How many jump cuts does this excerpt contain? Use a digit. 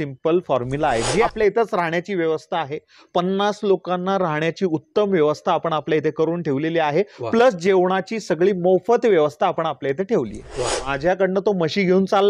2